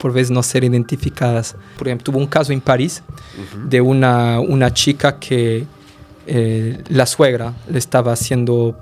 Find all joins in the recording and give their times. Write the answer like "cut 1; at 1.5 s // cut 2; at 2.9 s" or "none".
cut 1; at 1.7 s